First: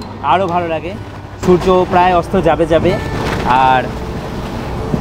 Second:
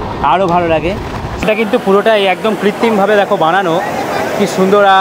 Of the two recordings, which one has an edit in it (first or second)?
second